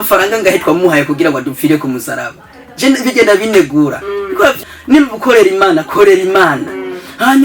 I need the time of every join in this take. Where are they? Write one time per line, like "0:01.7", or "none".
0:04.6